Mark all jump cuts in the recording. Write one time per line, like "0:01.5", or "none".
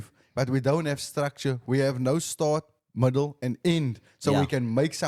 none